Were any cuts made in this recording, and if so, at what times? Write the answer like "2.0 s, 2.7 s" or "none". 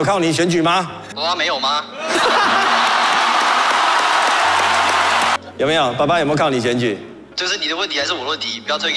1.0 s, 5.4 s